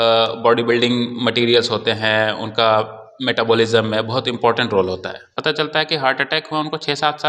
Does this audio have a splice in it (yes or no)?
yes